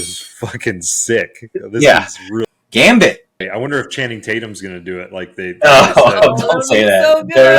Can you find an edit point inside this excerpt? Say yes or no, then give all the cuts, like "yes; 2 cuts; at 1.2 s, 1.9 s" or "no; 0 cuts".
yes; 2 cuts; at 2.4 s, 3.4 s